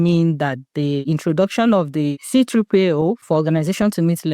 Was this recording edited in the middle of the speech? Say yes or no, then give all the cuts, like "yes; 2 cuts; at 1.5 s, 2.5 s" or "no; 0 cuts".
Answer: yes; 3 cuts; at 1.0 s, 2.2 s, 3.2 s